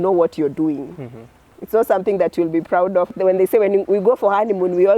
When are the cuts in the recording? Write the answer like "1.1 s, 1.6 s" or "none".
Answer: 3.1 s